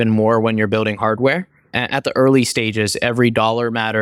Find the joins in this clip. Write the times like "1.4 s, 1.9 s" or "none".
1.6 s